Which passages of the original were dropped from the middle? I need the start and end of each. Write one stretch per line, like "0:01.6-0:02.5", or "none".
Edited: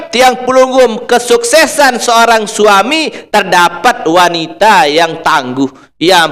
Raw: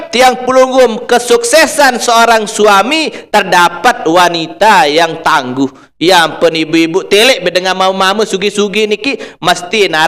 none